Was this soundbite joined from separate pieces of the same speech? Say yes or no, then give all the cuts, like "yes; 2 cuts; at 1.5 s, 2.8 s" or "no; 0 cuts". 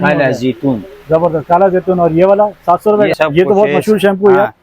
yes; 1 cut; at 3.1 s